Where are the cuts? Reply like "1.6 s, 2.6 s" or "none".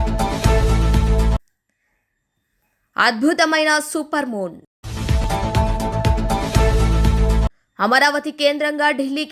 1.3 s